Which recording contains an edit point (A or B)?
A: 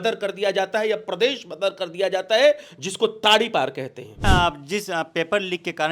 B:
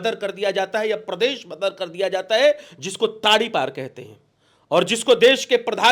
A